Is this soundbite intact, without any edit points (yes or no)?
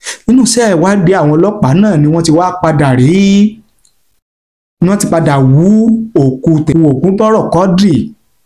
no